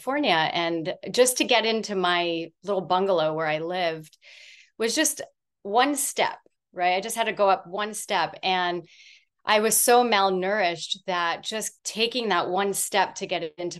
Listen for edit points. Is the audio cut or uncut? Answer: cut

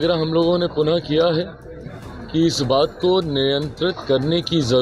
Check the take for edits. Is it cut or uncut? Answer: uncut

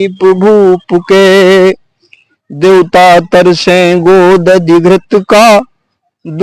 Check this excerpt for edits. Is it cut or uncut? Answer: uncut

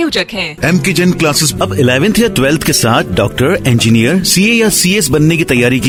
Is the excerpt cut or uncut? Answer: uncut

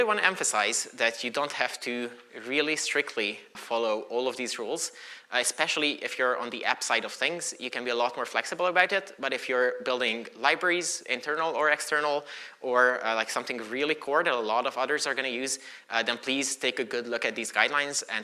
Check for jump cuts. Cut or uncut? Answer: cut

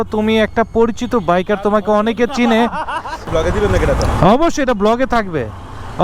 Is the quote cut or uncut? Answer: cut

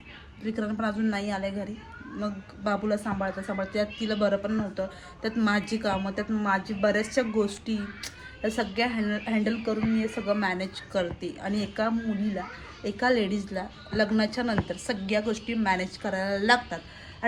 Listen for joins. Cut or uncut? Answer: uncut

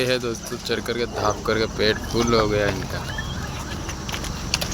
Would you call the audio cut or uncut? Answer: uncut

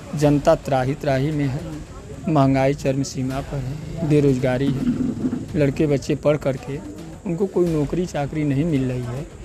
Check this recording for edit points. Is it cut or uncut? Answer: uncut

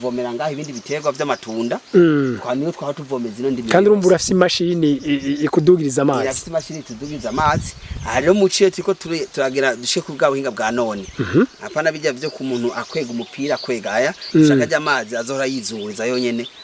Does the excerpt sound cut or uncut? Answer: uncut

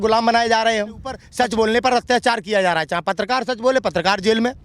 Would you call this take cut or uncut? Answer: cut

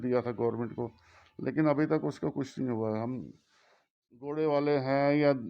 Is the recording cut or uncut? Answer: cut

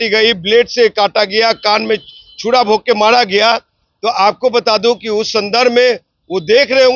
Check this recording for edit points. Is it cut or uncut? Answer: uncut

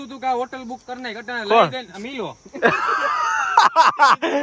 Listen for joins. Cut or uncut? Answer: uncut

